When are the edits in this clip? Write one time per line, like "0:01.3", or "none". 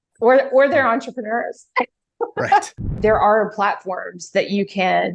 0:02.9